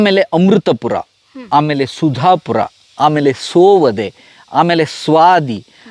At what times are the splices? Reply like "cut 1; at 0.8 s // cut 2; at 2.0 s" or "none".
none

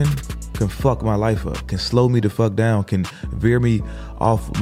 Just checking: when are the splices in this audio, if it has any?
none

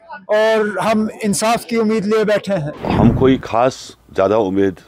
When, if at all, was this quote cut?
cut 1; at 2.7 s

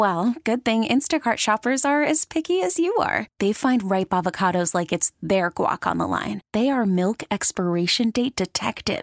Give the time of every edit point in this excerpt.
none

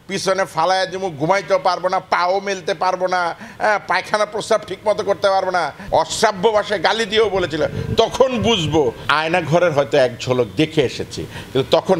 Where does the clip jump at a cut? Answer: cut 1; at 5.8 s // cut 2; at 9.0 s

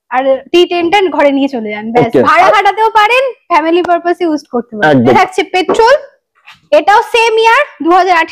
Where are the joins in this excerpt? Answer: cut 1; at 5.1 s

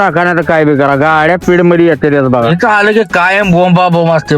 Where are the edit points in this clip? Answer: cut 1; at 2.5 s

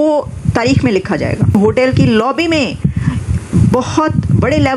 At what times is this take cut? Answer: cut 1; at 1.6 s

